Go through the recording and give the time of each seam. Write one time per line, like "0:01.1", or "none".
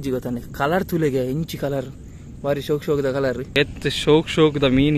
0:03.5

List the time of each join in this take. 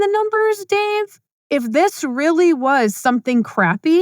0:01.2

